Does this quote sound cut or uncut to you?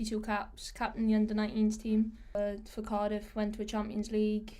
cut